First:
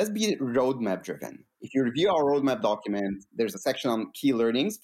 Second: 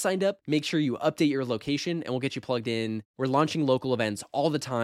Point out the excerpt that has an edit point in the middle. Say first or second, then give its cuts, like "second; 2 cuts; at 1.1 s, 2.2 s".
first; 1 cut; at 1.6 s